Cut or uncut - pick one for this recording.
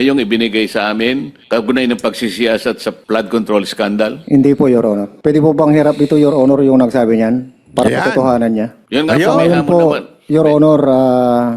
cut